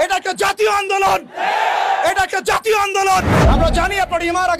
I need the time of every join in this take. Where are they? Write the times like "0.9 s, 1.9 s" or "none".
3.3 s

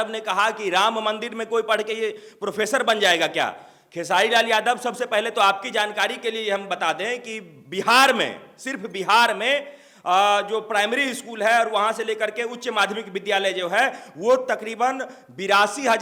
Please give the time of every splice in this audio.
none

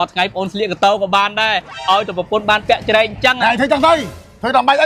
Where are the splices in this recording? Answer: none

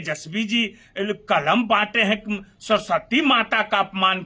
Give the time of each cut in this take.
none

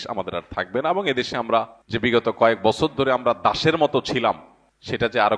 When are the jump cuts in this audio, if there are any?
1.8 s

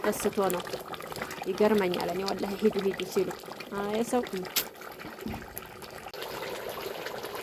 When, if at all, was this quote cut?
none

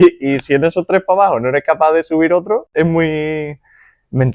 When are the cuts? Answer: 2.7 s

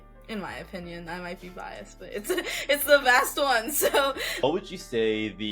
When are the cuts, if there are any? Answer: 4.4 s

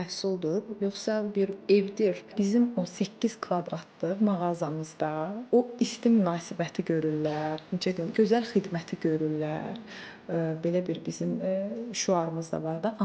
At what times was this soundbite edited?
2.3 s

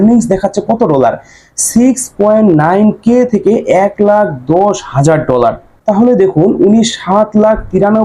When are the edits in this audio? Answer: 5.7 s

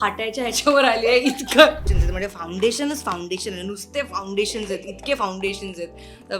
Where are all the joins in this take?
1.8 s

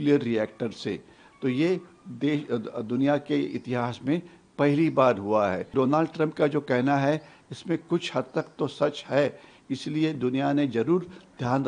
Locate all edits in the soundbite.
5.6 s

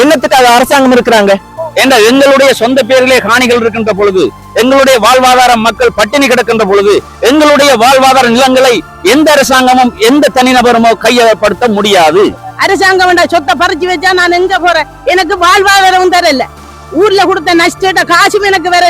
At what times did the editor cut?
1.5 s, 12.5 s

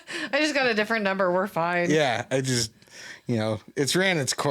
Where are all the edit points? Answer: none

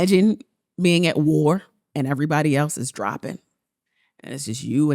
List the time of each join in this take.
1.8 s

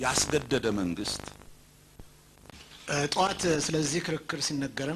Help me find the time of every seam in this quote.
2.6 s

